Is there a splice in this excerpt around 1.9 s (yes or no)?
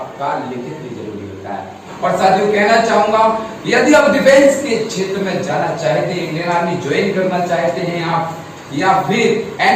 yes